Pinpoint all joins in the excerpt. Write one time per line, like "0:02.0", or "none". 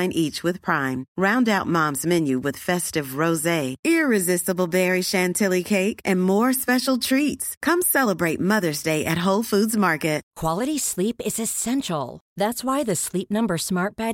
0:10.3

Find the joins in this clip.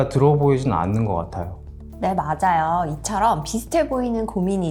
none

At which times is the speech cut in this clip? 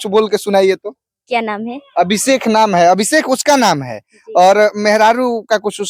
none

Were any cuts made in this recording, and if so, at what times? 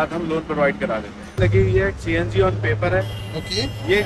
0:01.4

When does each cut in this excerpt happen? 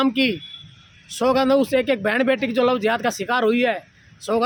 none

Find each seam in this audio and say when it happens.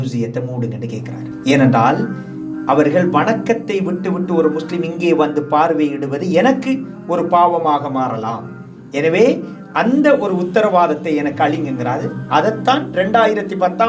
none

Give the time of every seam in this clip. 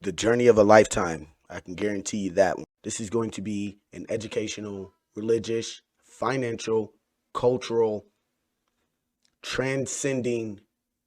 0:02.7

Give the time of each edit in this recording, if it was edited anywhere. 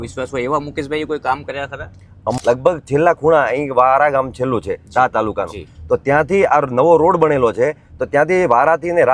0:02.3

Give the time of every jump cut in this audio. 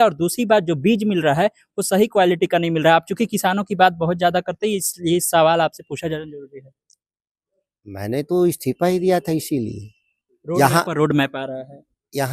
none

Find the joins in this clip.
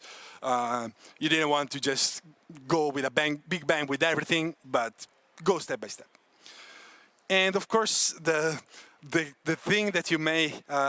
none

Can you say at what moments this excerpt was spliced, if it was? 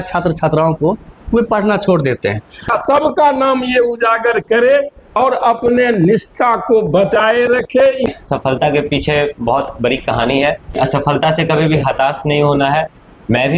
0:02.7
0:08.1
0:10.8

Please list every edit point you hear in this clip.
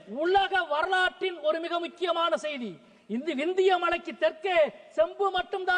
none

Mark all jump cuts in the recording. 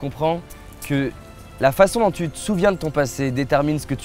none

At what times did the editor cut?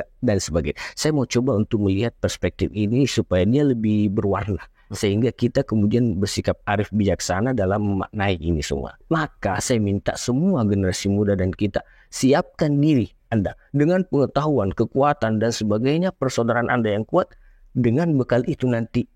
0:08.9

